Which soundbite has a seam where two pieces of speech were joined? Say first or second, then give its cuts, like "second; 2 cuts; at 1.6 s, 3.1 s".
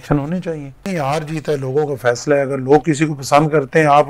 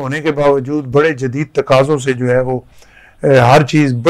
first; 1 cut; at 0.9 s